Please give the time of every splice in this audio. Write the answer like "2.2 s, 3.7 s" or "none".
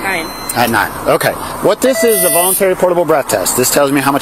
none

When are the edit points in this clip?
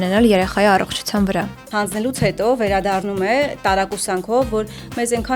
1.6 s

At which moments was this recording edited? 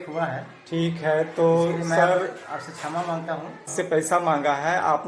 3.8 s

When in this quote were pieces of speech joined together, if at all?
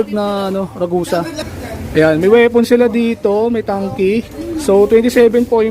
1.4 s

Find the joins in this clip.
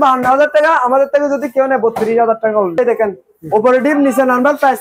2.8 s

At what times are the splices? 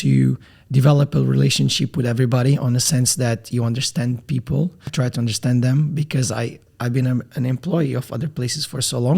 4.9 s, 6.7 s

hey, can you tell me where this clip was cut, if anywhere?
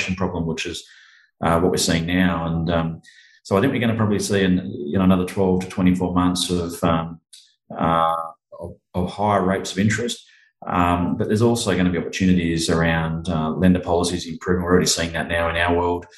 none

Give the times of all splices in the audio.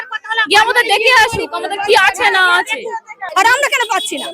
3.2 s

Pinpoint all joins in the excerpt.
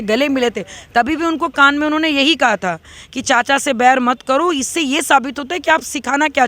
none

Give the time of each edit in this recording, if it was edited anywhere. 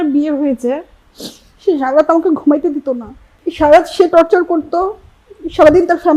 none

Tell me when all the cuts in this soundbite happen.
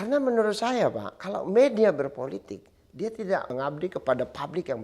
3.5 s

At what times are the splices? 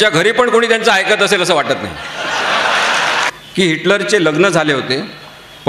3.3 s

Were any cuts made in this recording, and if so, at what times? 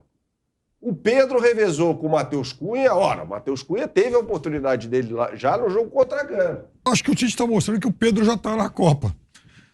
6.9 s

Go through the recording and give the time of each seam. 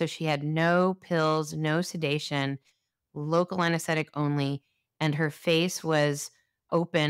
none

